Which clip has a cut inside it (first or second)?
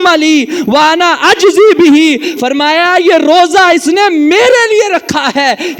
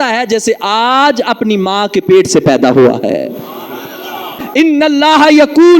second